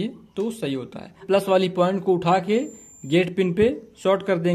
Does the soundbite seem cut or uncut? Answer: cut